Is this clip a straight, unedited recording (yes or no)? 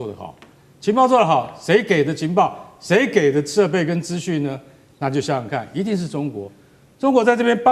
yes